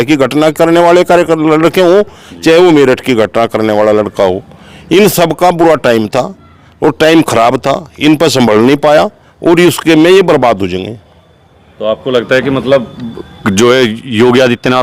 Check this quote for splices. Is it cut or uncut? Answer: uncut